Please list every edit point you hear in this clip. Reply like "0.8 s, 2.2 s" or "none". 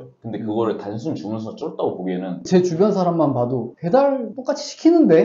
2.5 s, 3.7 s, 4.3 s